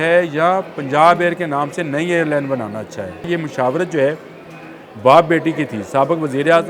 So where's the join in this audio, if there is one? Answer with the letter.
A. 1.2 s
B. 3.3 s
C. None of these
B